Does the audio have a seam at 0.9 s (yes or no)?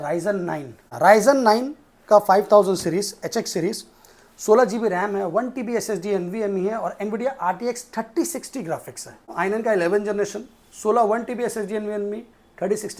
yes